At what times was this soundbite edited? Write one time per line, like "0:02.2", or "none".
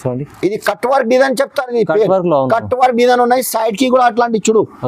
none